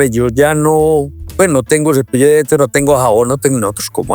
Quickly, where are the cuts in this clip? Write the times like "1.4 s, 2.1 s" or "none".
none